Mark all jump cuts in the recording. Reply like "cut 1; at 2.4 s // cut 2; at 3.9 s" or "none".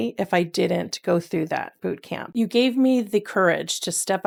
none